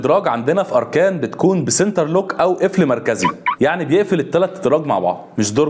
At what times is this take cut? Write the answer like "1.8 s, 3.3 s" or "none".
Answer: none